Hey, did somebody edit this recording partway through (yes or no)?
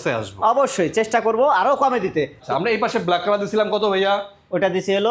yes